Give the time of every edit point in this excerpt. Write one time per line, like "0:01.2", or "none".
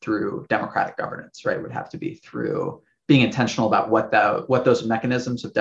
none